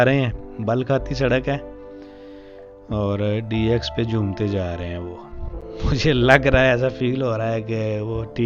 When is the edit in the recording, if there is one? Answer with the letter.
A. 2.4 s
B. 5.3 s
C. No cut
C